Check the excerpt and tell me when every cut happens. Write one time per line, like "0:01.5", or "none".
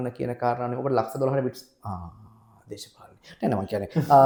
none